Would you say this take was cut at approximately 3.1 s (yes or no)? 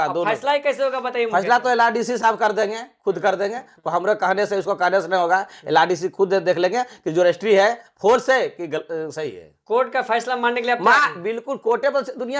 no